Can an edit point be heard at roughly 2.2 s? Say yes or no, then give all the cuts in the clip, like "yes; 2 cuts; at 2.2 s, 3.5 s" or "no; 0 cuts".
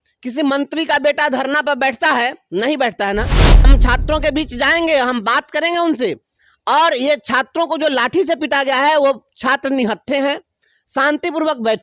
no; 1 cut; at 3.6 s